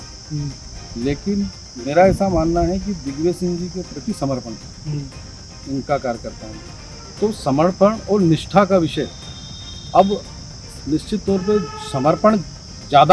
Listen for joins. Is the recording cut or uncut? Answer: uncut